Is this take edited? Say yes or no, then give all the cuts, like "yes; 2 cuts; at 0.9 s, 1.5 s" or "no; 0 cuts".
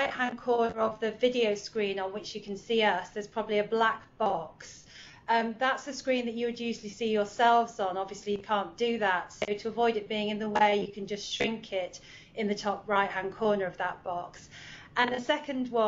yes; 1 cut; at 11.6 s